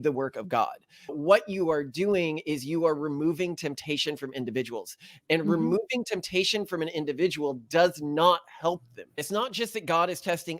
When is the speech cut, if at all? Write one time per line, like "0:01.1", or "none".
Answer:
0:01.1
0:09.2

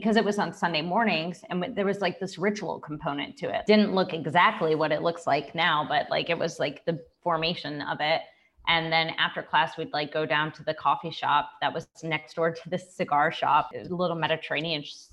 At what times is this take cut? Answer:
0:03.6

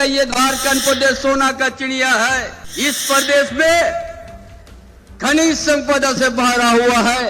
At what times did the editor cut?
0:02.6

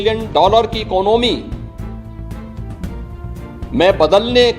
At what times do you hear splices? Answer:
0:01.9
0:03.7

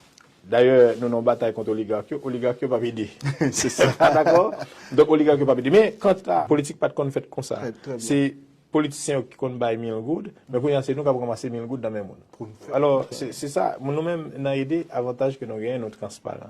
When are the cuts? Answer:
0:06.4
0:12.6

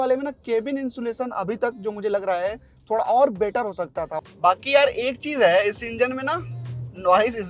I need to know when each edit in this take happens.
0:04.1

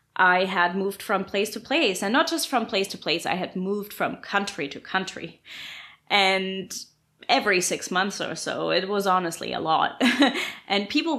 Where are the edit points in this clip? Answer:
none

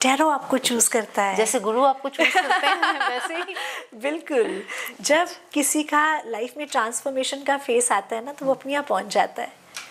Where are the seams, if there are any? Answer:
none

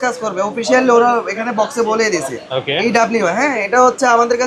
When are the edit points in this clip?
none

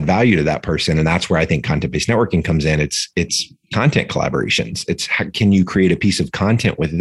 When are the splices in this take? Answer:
none

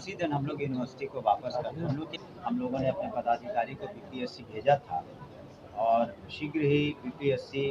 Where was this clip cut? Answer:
0:02.1

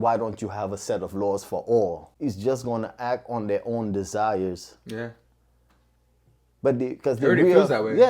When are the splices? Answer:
0:02.1

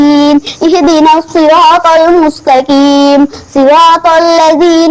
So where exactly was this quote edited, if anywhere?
none

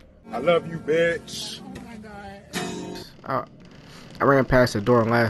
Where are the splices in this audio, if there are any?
none

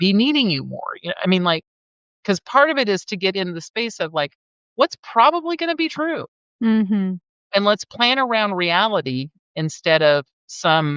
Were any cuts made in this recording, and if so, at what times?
none

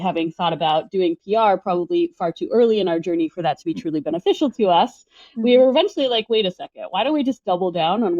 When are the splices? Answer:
none

